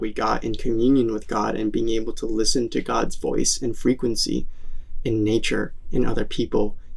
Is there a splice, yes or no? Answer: no